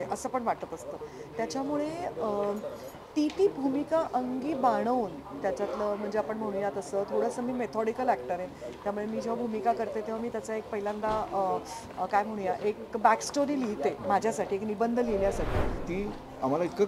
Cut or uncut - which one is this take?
cut